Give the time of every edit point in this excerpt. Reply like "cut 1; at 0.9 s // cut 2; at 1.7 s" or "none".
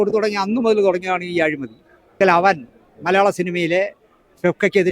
cut 1; at 2.2 s